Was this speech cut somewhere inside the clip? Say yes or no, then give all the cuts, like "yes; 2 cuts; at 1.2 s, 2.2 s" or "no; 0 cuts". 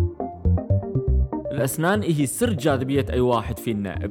yes; 1 cut; at 1.5 s